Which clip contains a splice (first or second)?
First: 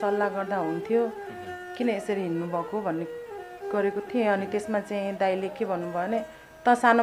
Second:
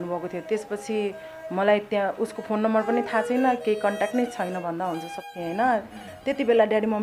second